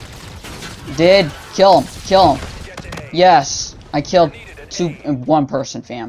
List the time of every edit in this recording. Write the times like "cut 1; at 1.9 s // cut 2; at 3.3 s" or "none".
none